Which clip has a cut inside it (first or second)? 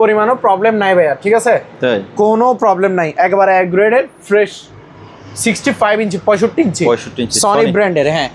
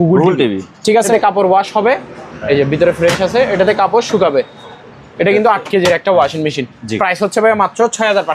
second